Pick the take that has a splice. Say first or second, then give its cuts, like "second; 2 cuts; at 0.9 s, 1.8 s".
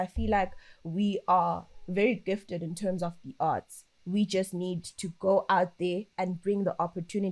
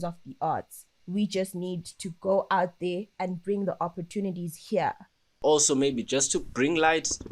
second; 1 cut; at 5.3 s